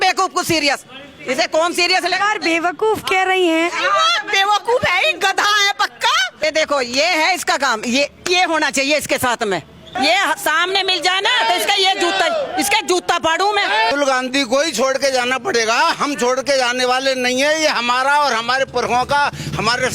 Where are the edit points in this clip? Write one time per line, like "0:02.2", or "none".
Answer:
0:06.4
0:09.8
0:13.9